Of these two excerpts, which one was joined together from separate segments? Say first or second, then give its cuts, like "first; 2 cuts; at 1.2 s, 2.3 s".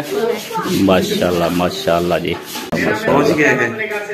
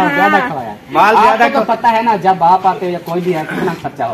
first; 1 cut; at 2.9 s